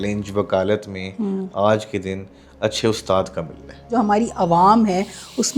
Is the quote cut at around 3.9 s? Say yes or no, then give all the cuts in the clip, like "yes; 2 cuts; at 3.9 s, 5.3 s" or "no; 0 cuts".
yes; 1 cut; at 3.9 s